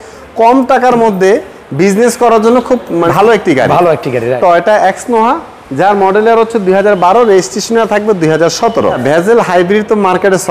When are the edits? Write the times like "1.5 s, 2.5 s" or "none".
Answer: 3.1 s, 4.4 s, 9.0 s